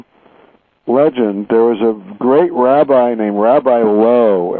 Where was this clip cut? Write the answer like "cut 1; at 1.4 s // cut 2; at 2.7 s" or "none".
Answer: cut 1; at 3.6 s